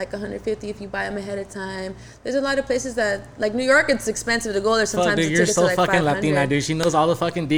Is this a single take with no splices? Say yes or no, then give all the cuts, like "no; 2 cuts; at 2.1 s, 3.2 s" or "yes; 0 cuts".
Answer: yes; 0 cuts